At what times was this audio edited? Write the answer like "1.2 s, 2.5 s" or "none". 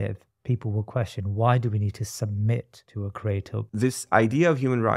3.3 s